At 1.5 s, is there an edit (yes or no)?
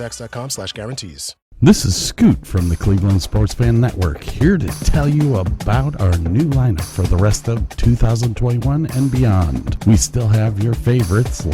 yes